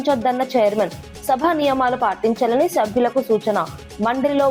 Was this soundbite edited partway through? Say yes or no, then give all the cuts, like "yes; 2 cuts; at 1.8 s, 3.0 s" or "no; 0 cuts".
no; 0 cuts